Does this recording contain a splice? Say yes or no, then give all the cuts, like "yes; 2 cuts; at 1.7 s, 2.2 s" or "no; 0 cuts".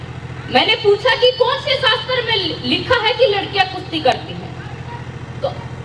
no; 0 cuts